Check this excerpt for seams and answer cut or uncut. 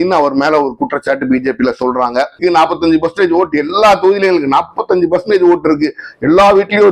cut